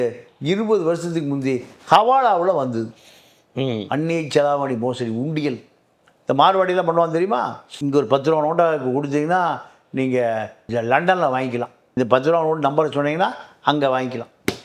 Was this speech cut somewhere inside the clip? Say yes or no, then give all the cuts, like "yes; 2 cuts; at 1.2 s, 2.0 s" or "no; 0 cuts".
no; 0 cuts